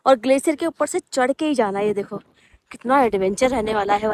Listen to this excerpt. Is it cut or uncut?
uncut